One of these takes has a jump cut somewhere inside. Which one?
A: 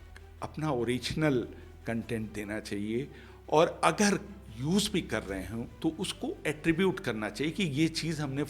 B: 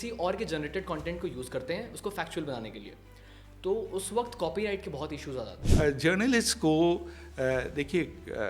B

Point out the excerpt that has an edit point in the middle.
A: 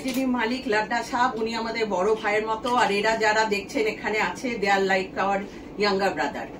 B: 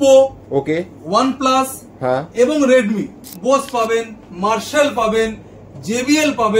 B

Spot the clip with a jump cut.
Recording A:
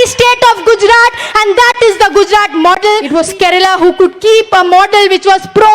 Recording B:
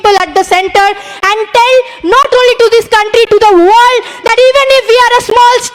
A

